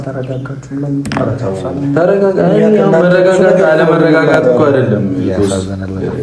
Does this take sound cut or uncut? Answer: uncut